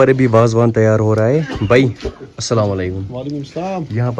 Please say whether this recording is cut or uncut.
uncut